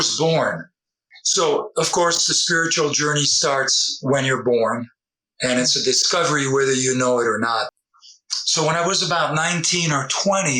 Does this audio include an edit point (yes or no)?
yes